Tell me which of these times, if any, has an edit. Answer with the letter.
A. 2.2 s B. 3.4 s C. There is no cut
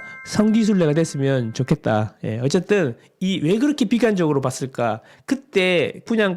C